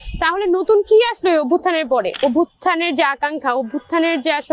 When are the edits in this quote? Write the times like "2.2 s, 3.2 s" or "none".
2.2 s